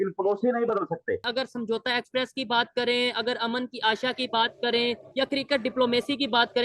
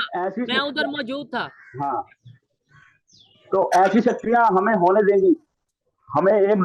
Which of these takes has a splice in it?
first; 1 cut; at 1.3 s

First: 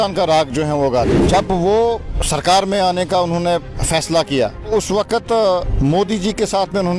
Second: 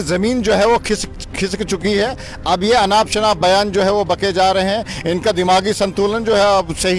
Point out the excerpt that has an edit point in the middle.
first; 5 cuts; at 1.2 s, 2.1 s, 3.8 s, 4.7 s, 5.7 s

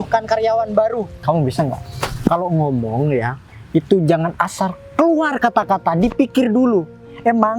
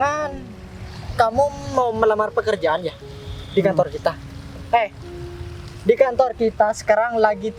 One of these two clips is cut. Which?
first; 1 cut; at 1.1 s

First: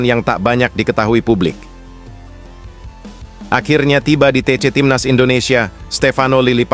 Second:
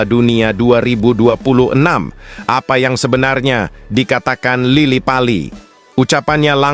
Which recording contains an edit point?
first; 2 cuts; at 1.7 s, 3.5 s

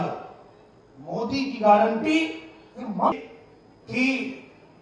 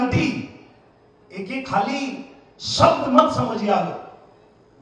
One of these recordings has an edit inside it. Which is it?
first; 1 cut; at 3.1 s

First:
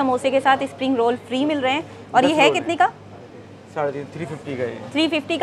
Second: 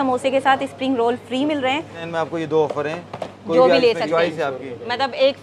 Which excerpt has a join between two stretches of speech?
second; 1 cut; at 2.0 s

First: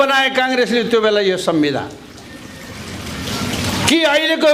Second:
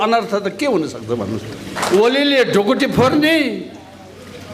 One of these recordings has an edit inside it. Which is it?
second; 1 cut; at 1.5 s

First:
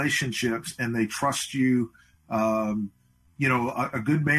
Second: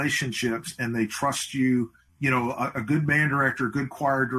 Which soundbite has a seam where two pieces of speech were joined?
second; 1 cut; at 2.0 s

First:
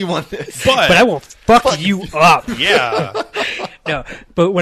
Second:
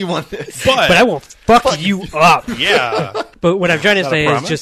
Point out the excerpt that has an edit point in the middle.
second; 1 cut; at 3.2 s

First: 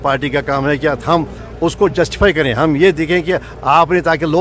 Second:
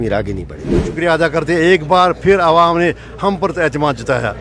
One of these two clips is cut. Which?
second; 1 cut; at 0.9 s

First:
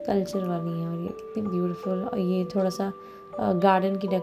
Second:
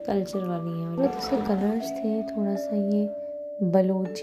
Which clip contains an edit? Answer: second; 1 cut; at 1.0 s

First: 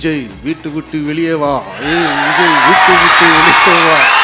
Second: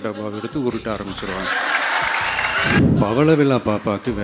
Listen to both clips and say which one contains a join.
second; 1 cut; at 2.8 s

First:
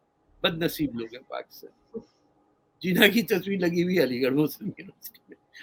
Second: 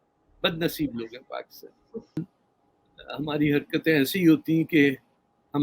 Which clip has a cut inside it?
second; 1 cut; at 2.2 s

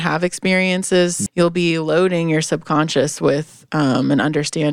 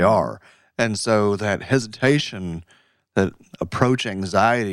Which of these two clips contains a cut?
first; 1 cut; at 1.2 s

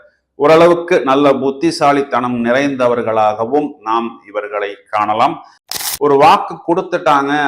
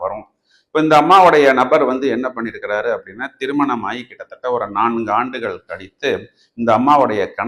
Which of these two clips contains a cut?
first; 1 cut; at 5.7 s

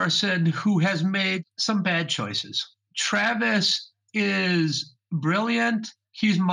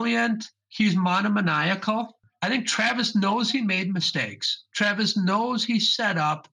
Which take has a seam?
second; 1 cut; at 2.2 s

